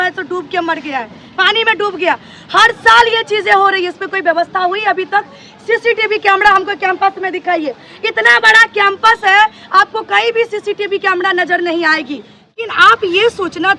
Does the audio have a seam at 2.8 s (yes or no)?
no